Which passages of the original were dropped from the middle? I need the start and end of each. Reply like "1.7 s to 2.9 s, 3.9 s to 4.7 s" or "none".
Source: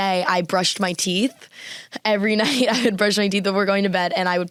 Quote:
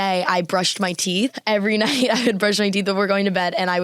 1.4 s to 2.0 s